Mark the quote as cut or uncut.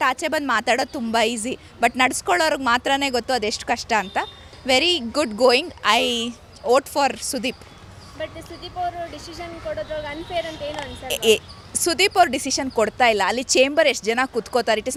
uncut